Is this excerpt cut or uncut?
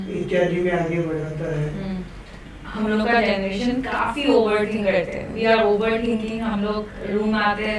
cut